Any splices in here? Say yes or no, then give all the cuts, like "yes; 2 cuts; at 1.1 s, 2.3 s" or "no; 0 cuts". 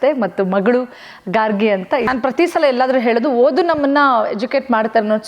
yes; 1 cut; at 2.1 s